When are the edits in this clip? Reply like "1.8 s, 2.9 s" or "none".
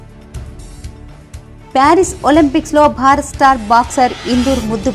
1.7 s